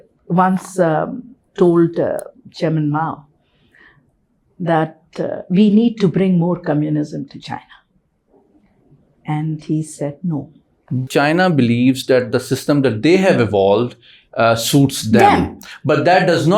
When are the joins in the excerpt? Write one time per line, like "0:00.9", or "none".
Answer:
0:11.1